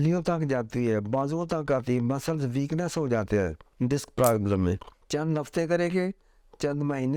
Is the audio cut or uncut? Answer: uncut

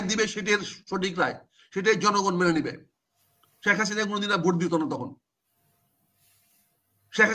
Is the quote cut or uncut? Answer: uncut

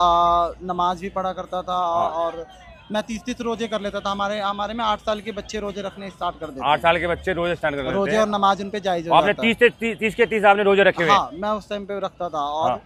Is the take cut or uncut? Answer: uncut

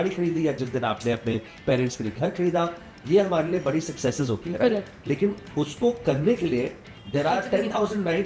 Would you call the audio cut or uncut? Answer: uncut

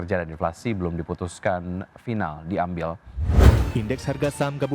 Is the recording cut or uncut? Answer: cut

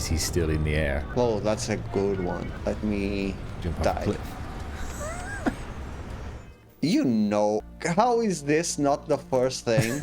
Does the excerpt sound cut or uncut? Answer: cut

